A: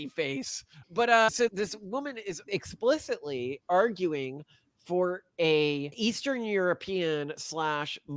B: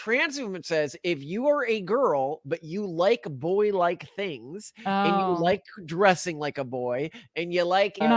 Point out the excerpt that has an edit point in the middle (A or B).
A